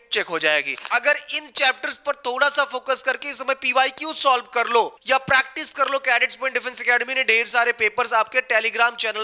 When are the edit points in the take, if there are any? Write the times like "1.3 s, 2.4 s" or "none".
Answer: 0.8 s, 5.0 s